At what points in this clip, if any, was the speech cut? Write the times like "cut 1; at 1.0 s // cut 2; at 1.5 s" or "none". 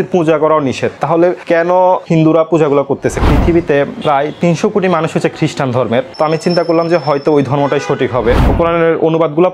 cut 1; at 1.0 s // cut 2; at 3.2 s // cut 3; at 8.5 s